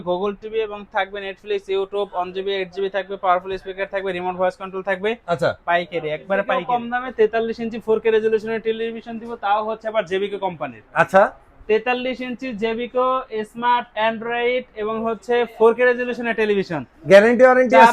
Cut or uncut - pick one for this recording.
cut